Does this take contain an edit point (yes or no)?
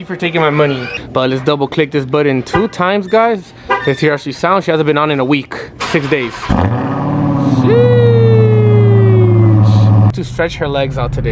yes